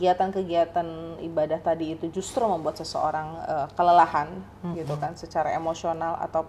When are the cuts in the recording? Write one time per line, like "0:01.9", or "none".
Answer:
none